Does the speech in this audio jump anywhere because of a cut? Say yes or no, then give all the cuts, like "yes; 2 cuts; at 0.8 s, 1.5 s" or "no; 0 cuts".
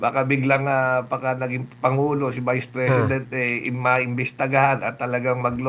no; 0 cuts